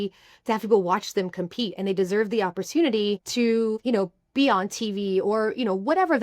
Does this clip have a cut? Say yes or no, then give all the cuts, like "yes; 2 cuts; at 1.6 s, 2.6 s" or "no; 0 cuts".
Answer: yes; 1 cut; at 3.5 s